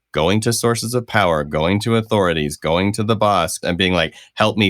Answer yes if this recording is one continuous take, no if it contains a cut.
no